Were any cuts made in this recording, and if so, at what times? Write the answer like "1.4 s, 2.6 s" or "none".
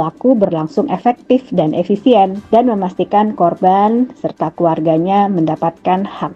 2.4 s